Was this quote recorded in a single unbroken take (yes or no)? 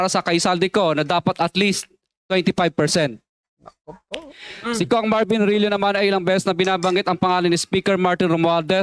yes